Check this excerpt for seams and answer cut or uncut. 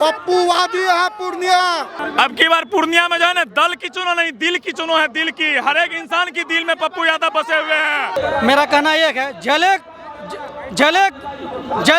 cut